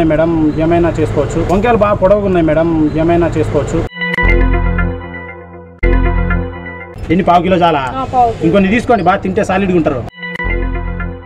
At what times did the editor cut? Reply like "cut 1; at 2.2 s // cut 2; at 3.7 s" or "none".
cut 1; at 1.5 s // cut 2; at 3.8 s // cut 3; at 6.8 s